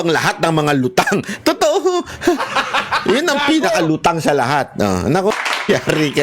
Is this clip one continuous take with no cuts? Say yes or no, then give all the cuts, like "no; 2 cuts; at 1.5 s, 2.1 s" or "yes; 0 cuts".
no; 1 cut; at 5.3 s